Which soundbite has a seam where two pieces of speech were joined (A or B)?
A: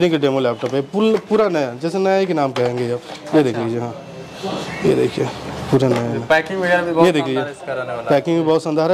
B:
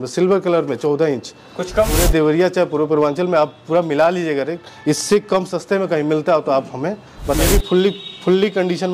B